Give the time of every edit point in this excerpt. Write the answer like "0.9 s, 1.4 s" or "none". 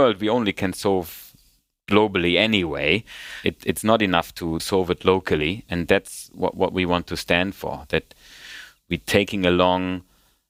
none

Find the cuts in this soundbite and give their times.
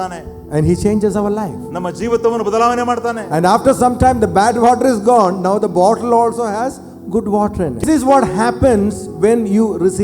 7.8 s

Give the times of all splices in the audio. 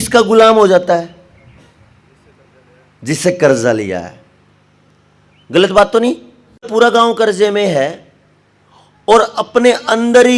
6.7 s

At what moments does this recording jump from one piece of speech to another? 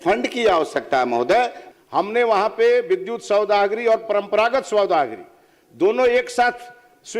1.6 s

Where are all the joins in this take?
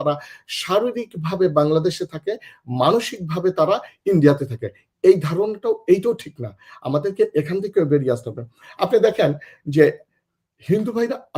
none

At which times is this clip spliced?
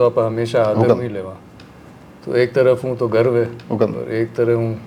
none

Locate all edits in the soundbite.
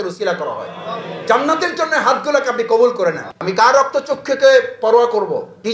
3.2 s

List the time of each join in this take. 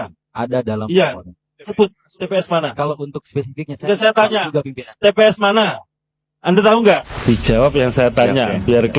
7.1 s

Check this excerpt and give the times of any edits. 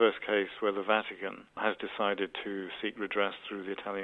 1.6 s

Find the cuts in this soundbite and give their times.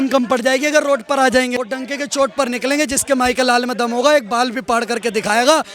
1.6 s

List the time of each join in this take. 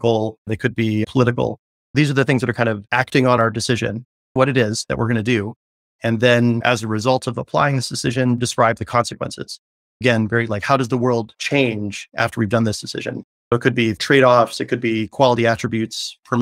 none

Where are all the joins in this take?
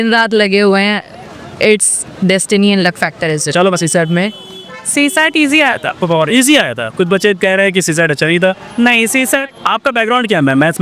none

